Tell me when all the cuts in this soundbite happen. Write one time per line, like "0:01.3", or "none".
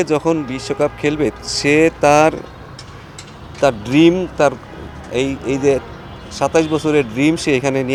none